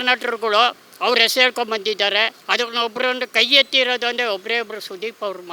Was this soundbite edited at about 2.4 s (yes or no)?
yes